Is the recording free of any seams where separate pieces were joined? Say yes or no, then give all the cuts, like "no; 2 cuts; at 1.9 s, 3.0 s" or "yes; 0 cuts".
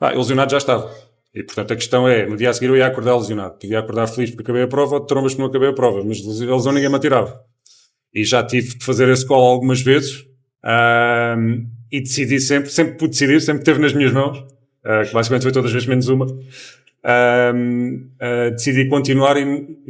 yes; 0 cuts